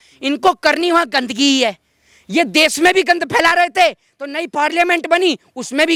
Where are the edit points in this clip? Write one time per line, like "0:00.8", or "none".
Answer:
none